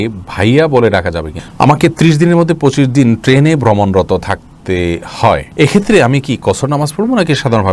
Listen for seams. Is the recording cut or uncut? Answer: cut